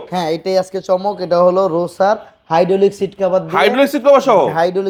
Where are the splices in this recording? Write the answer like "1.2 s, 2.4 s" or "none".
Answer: none